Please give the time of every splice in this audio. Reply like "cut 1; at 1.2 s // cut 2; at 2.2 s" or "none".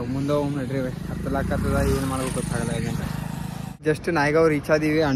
none